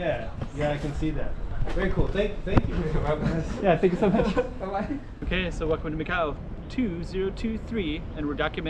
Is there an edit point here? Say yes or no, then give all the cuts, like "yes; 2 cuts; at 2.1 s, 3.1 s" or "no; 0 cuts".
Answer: yes; 1 cut; at 5.2 s